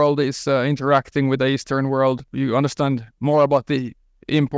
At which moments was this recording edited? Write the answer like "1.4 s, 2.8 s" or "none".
2.3 s